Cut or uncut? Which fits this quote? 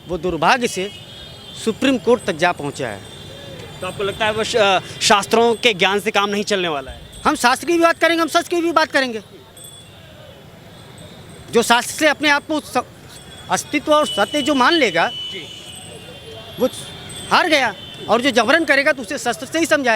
uncut